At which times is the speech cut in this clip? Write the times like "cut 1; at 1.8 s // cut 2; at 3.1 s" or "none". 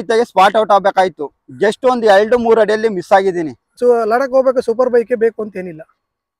cut 1; at 3.8 s